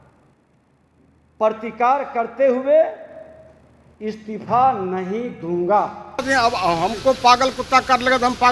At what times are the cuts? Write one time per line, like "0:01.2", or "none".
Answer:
0:06.2